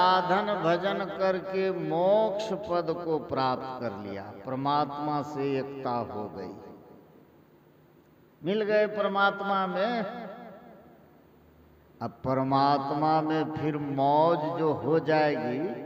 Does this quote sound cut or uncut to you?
uncut